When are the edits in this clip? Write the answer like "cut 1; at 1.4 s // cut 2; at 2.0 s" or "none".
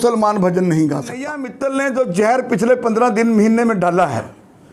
cut 1; at 1.5 s